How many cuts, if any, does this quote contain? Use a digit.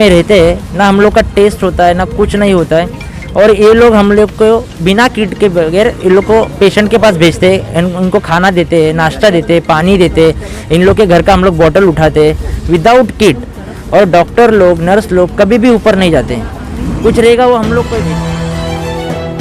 1